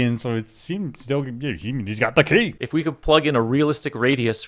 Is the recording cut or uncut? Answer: cut